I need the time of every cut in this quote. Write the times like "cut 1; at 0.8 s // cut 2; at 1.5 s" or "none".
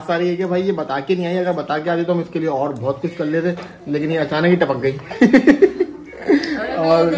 none